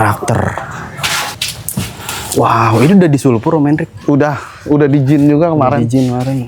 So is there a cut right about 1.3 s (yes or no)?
yes